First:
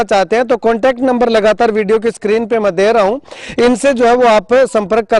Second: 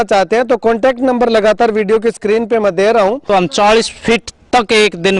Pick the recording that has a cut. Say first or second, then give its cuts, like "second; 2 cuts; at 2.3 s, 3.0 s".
second; 1 cut; at 3.3 s